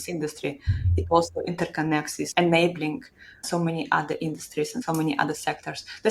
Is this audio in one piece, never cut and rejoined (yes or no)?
no